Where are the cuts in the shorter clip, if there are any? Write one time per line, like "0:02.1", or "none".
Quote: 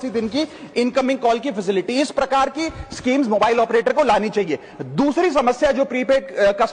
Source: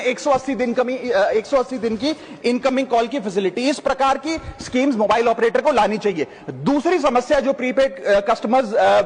none